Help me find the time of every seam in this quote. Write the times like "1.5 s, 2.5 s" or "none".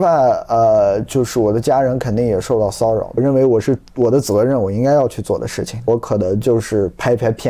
3.2 s, 5.9 s